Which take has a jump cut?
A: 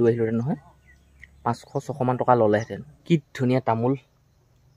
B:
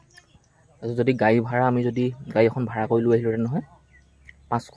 A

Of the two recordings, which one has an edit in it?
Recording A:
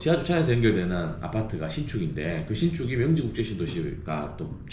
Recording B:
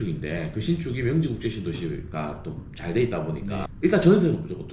B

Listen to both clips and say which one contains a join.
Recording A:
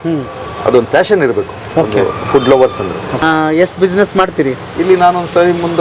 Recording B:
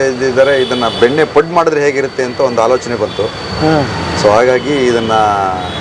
A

